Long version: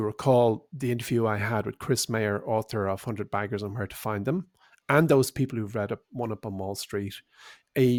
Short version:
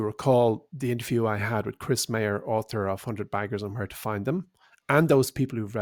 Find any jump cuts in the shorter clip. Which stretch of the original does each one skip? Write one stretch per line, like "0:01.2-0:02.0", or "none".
none

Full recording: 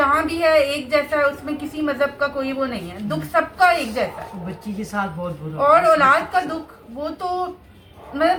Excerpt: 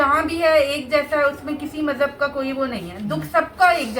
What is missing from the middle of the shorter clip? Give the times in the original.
none

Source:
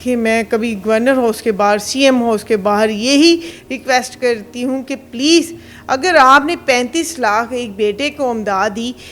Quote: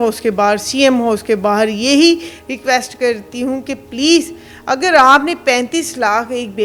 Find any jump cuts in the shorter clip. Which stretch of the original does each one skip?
none

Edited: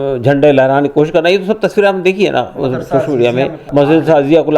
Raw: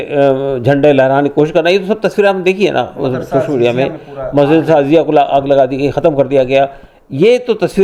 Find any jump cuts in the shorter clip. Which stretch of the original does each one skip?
0:04.0-0:04.2

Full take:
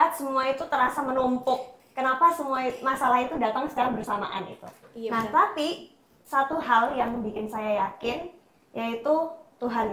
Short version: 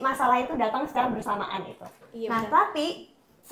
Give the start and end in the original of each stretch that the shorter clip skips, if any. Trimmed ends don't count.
none

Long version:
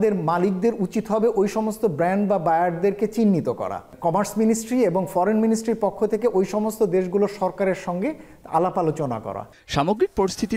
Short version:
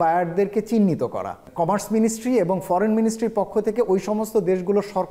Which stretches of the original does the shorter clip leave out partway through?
none

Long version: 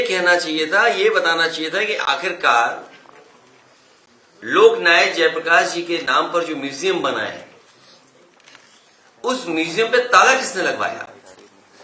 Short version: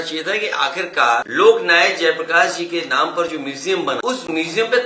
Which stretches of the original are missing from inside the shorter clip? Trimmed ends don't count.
0:02.7-0:04.4
0:07.2-0:09.2

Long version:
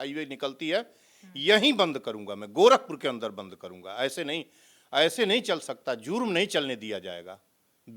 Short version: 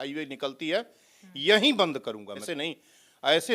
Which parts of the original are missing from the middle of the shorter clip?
0:02.5-0:04.2

